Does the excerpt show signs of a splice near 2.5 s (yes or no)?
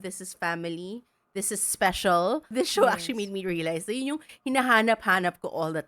yes